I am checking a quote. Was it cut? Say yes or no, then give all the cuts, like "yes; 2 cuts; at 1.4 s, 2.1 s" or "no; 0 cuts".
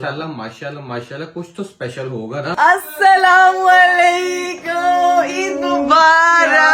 yes; 1 cut; at 2.5 s